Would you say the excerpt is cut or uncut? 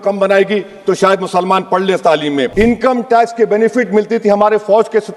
cut